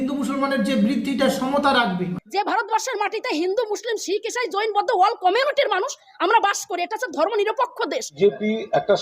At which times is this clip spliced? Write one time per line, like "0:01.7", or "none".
0:02.1
0:08.0